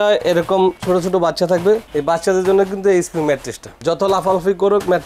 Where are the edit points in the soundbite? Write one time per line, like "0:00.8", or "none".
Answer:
none